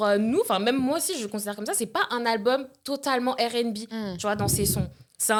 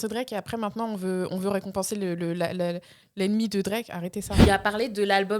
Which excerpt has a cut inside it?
second; 1 cut; at 4.4 s

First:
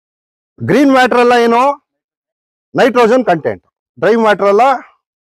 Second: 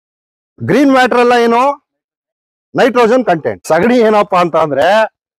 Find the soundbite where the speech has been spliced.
second; 1 cut; at 3.5 s

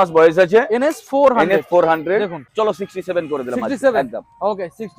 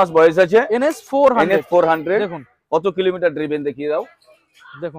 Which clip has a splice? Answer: first; 1 cut; at 2.4 s

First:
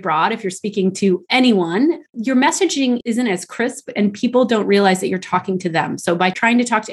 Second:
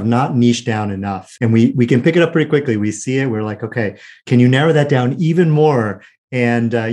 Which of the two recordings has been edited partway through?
second; 2 cuts; at 1.2 s, 4.1 s

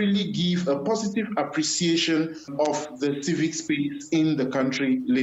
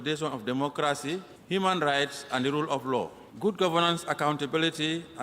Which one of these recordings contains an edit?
second; 2 cuts; at 1.3 s, 3.2 s

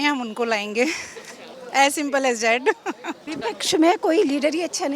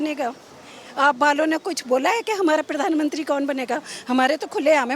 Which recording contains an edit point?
first; 1 cut; at 3.3 s

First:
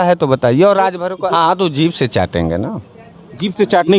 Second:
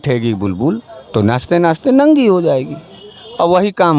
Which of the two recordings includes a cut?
first; 1 cut; at 1.2 s

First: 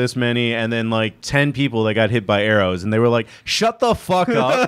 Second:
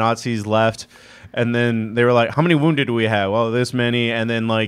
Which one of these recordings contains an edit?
second; 1 cut; at 2.3 s

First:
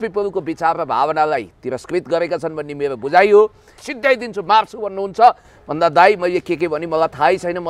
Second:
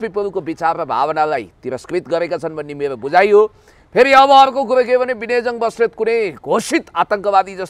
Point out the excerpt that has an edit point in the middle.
first; 1 cut; at 3.8 s

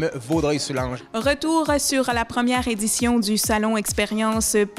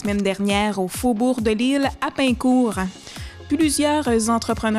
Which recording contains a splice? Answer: first; 1 cut; at 1.0 s

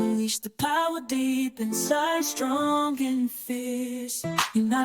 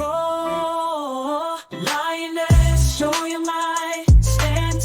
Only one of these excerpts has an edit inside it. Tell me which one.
first; 1 cut; at 1.7 s

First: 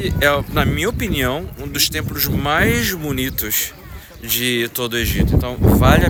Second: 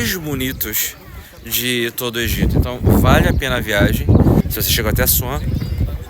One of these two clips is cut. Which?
second; 1 cut; at 4.4 s

